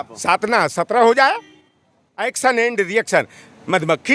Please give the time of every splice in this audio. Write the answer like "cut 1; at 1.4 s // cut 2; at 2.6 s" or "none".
none